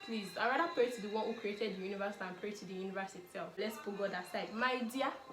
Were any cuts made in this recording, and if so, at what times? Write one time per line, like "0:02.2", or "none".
0:03.6

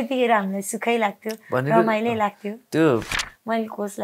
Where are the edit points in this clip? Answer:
0:03.1

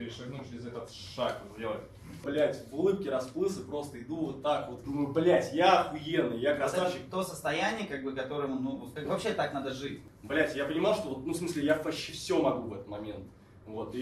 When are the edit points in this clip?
0:02.2
0:04.8
0:08.9
0:10.1

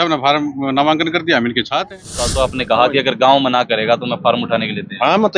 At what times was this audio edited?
0:02.3

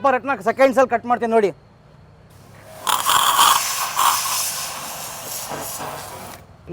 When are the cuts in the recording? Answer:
none

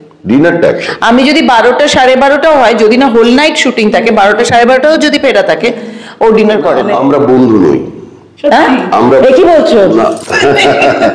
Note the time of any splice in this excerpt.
0:06.9

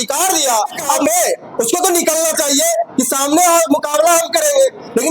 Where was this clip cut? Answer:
0:01.0

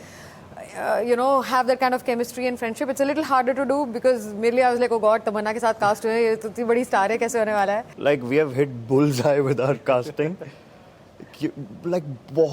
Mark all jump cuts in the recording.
0:07.9

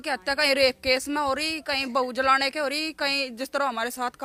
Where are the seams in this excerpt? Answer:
none

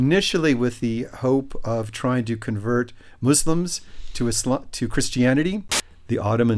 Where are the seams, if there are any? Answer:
0:05.6

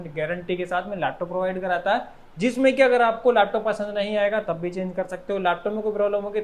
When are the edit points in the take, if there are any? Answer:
none

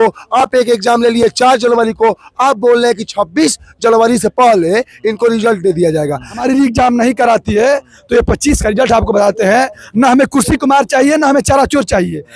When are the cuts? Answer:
0:06.4

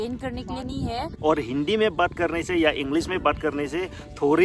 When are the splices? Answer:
0:01.1

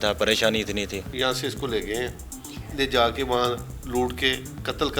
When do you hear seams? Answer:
0:01.1
0:03.7

